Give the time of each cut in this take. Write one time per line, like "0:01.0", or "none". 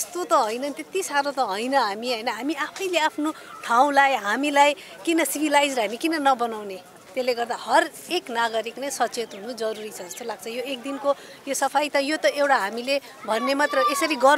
none